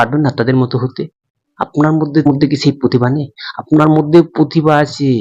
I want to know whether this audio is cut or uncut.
cut